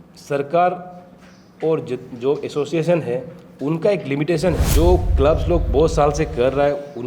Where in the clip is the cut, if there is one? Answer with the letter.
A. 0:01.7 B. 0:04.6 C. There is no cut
B